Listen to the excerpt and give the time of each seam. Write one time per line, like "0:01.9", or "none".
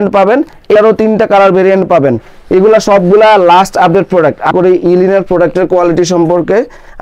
0:00.8
0:04.5